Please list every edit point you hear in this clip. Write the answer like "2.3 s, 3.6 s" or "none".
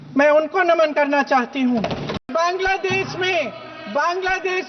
2.2 s

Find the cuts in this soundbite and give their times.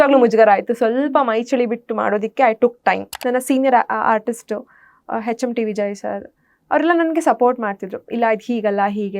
3.1 s

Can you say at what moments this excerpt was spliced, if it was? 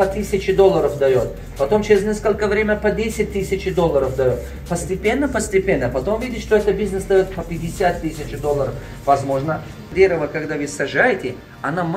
9.9 s

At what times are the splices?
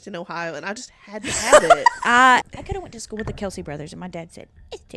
2.5 s

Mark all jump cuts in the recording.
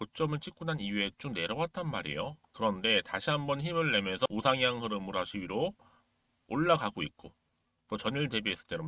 4.3 s

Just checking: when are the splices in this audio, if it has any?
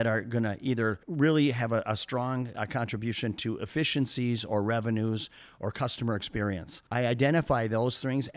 1.0 s, 6.8 s

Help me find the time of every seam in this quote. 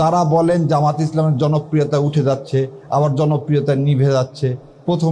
none

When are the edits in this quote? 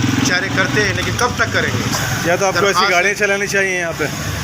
1.9 s

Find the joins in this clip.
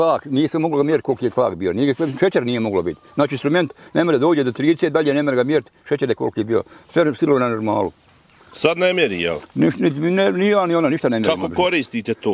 none

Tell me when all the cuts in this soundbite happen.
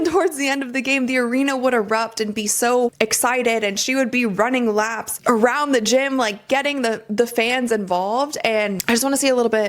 8.1 s

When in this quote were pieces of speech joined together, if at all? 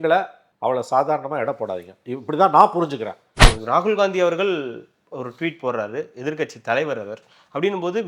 3.5 s

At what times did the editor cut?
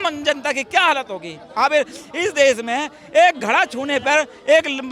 none

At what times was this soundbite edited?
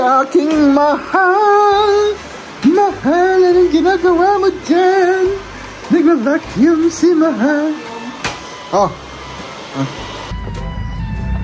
10.3 s

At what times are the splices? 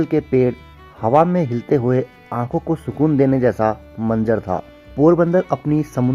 4.8 s

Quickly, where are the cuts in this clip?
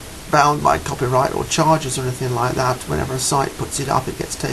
3.2 s

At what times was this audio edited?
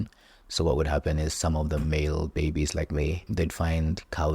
3.3 s

